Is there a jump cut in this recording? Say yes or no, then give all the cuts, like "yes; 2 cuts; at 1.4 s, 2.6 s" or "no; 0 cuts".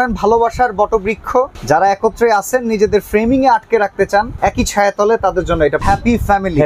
yes; 3 cuts; at 1.6 s, 4.3 s, 5.8 s